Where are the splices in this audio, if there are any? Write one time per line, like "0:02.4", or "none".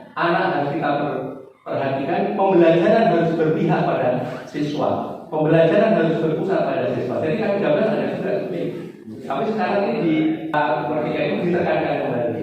0:10.5